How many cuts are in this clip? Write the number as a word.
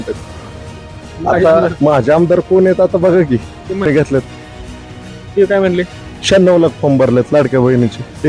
two